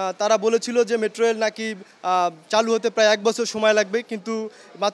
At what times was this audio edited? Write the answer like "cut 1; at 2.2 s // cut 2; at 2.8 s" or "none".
none